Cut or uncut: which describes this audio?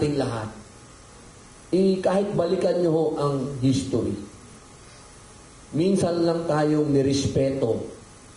uncut